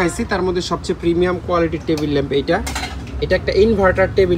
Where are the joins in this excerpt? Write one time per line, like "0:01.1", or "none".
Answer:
none